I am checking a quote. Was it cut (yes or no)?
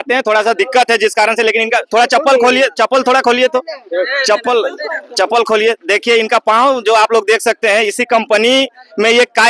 no